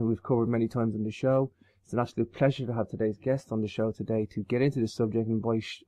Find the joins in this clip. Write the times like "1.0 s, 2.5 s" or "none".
1.3 s